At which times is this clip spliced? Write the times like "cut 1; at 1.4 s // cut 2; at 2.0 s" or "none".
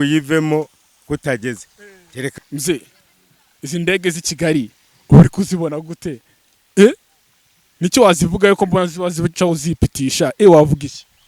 cut 1; at 2.3 s